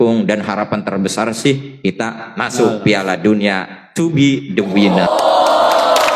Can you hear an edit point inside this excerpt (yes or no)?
yes